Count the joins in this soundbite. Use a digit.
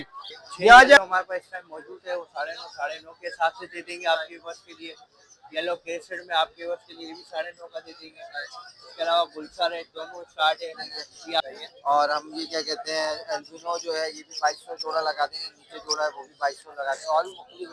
2